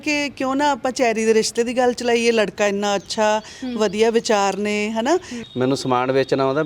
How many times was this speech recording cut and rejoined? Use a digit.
1